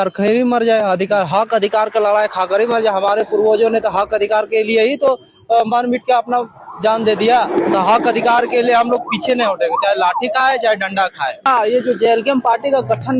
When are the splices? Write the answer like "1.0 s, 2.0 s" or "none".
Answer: 11.5 s